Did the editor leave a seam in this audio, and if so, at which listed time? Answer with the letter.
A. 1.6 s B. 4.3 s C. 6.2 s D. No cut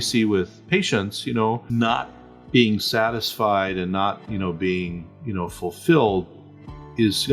A